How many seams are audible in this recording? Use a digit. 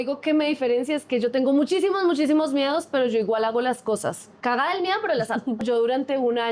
2